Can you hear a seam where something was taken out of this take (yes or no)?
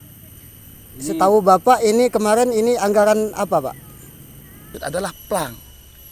yes